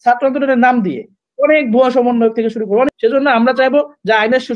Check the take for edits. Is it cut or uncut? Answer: cut